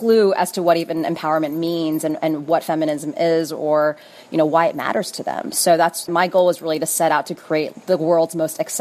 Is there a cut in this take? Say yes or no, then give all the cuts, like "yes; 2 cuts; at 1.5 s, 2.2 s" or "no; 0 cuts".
no; 0 cuts